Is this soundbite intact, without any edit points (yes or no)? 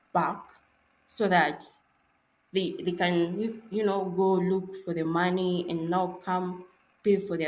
yes